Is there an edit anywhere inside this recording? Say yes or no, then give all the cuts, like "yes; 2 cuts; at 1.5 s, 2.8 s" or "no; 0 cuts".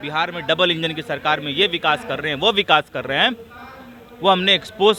no; 0 cuts